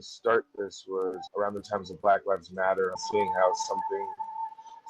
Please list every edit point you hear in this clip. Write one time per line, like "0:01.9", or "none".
0:03.0